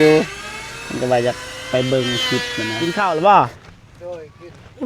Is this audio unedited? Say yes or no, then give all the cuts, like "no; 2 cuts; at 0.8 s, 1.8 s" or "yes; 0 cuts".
no; 1 cut; at 3.0 s